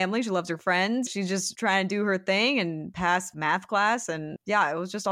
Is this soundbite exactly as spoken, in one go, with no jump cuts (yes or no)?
no